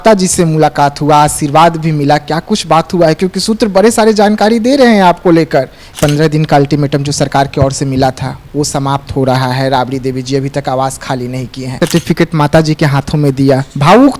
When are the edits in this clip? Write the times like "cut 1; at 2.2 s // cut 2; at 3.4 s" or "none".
cut 1; at 5.8 s // cut 2; at 11.8 s